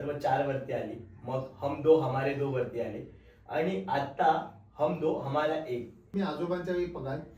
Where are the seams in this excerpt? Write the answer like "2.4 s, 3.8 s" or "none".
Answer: 6.0 s